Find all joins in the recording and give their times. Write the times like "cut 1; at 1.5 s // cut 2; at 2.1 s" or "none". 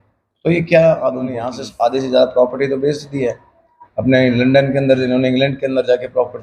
cut 1; at 1.6 s